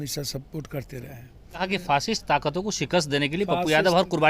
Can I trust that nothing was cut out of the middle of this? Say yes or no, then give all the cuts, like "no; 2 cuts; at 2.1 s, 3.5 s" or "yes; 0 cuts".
no; 1 cut; at 1.6 s